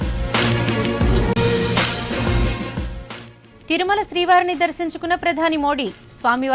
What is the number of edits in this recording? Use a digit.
1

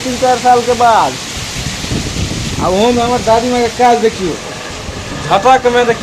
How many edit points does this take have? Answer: 0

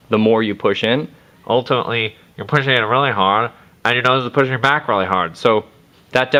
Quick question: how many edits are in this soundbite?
0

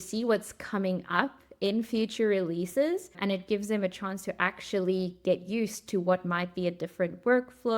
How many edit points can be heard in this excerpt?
1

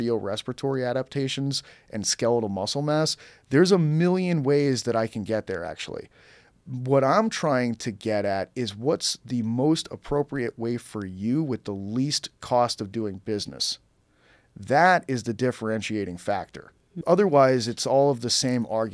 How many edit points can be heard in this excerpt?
1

